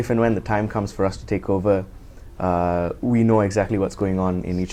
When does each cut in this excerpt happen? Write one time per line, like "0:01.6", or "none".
none